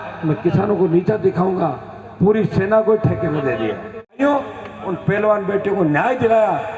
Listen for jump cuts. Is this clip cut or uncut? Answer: cut